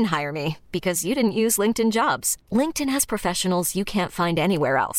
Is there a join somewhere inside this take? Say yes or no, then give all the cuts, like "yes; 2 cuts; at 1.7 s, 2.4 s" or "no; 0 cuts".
no; 0 cuts